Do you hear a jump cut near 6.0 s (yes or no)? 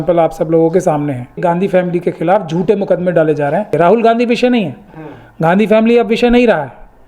no